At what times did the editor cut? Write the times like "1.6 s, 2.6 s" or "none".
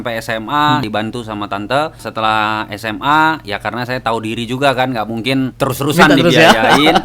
0.8 s, 2.0 s, 5.5 s